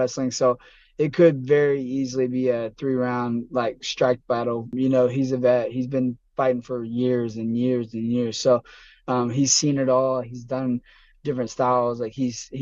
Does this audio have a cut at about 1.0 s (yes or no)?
no